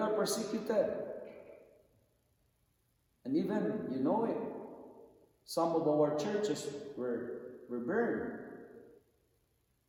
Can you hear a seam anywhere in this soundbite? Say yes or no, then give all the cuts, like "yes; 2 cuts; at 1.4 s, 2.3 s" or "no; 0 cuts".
no; 0 cuts